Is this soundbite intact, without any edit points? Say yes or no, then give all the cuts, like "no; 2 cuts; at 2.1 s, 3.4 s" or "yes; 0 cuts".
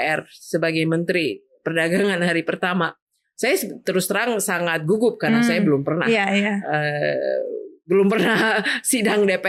yes; 0 cuts